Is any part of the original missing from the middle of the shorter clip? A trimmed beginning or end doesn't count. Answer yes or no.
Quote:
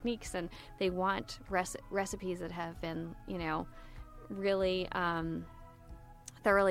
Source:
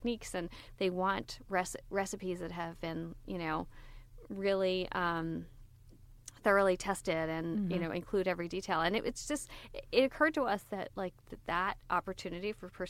no